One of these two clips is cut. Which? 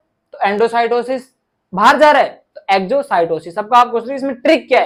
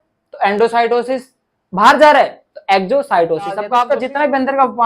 second; 1 cut; at 3.9 s

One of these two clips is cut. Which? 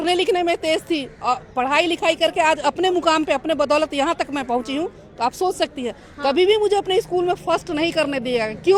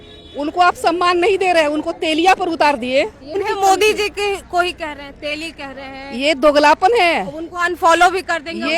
second; 1 cut; at 3.4 s

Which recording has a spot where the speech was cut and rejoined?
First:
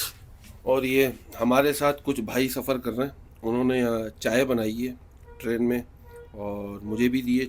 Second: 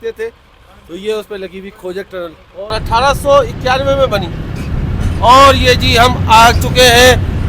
second; 1 cut; at 2.7 s

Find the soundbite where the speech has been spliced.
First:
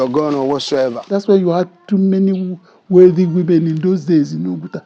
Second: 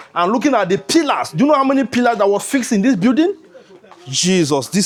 first; 1 cut; at 1.0 s

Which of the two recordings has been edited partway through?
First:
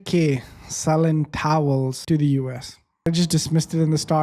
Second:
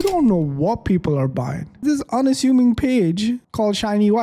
first; 2 cuts; at 2.0 s, 3.1 s

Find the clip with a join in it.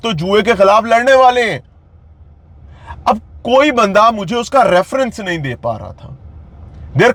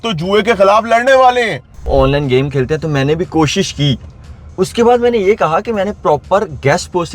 second; 1 cut; at 1.9 s

